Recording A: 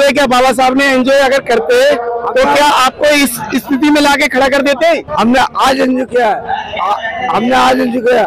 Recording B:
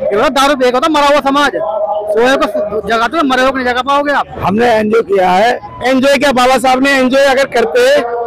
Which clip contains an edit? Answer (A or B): B